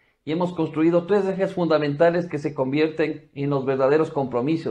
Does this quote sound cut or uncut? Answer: cut